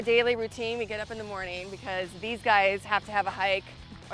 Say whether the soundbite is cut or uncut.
uncut